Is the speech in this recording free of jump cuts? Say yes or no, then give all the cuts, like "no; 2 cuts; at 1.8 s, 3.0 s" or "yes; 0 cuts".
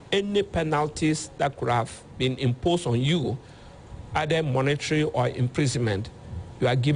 yes; 0 cuts